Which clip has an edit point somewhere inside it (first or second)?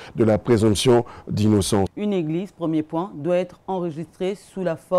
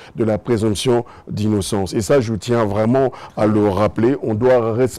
first